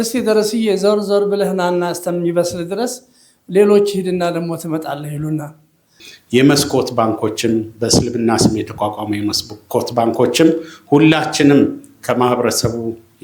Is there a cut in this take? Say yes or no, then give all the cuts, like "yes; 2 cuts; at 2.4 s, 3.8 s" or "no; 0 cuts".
yes; 1 cut; at 6.0 s